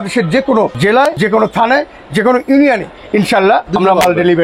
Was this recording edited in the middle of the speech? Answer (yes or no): yes